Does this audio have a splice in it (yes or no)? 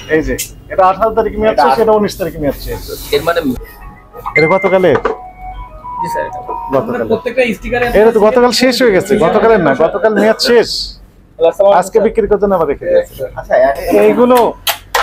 yes